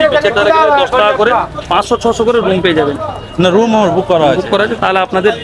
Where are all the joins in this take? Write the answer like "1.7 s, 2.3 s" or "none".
none